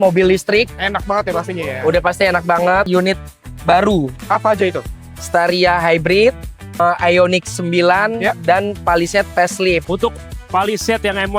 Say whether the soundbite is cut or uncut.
cut